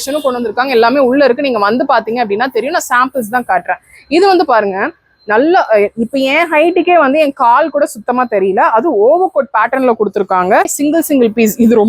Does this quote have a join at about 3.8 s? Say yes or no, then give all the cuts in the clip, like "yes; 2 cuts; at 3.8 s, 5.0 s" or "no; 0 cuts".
no; 1 cut; at 10.7 s